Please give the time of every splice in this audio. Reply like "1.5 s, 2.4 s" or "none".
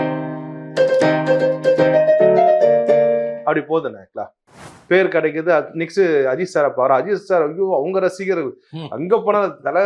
4.7 s